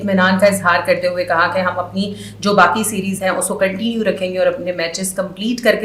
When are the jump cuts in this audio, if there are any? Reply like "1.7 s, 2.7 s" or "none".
none